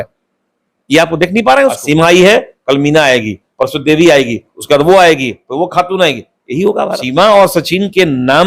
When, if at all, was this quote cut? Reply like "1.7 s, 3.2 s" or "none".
1.8 s, 7.0 s